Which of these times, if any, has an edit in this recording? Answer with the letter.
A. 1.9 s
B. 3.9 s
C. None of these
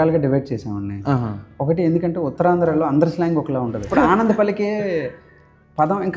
B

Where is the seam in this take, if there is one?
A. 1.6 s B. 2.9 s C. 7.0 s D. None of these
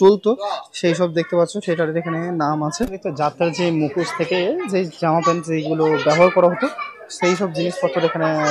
B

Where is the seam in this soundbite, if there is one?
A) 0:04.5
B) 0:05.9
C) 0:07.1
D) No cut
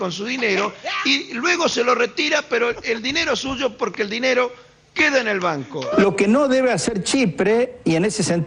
B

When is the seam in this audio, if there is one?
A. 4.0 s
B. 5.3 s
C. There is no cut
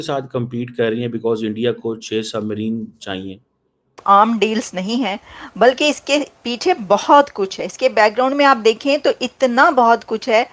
A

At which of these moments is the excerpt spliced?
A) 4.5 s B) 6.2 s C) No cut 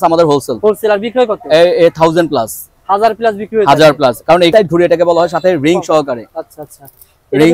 A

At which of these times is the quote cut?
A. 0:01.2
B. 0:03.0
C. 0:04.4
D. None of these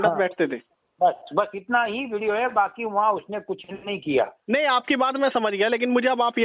C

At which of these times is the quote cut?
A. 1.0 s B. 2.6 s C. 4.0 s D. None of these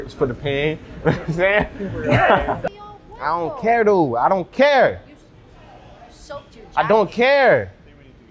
B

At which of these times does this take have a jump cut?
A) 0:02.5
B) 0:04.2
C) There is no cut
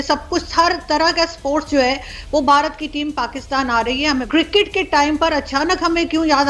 B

